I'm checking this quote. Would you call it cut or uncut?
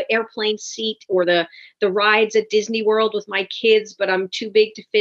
uncut